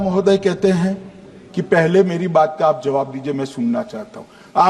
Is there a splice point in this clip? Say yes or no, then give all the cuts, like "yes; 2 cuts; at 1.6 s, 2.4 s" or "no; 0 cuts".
no; 0 cuts